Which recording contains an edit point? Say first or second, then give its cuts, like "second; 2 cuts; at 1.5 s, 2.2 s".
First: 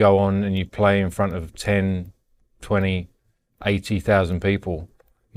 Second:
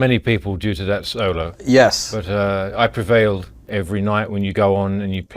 second; 1 cut; at 3.6 s